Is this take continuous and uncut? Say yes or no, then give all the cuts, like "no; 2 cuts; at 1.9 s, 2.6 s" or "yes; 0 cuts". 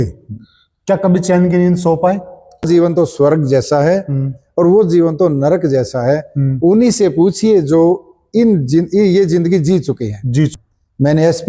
no; 2 cuts; at 2.7 s, 10.6 s